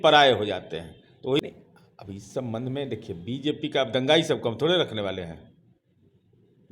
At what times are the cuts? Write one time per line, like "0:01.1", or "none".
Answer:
0:01.4